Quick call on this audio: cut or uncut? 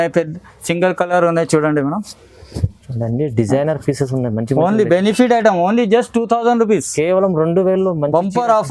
uncut